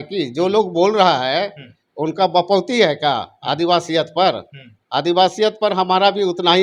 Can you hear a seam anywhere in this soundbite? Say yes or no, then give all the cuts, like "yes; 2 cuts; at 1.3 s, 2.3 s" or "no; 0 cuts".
no; 0 cuts